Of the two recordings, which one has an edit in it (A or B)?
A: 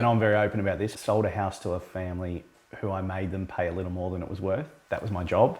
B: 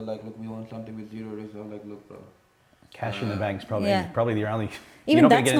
A